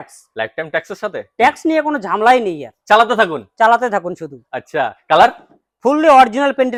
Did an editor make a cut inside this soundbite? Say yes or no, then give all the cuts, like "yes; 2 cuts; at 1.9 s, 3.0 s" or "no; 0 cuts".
no; 0 cuts